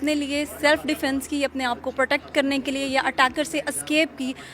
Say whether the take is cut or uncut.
uncut